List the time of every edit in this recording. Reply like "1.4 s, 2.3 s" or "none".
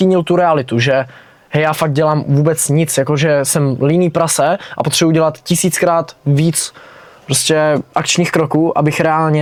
none